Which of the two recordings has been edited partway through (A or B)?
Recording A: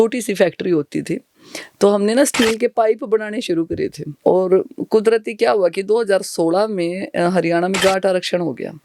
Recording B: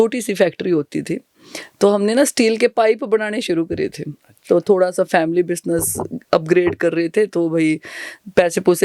A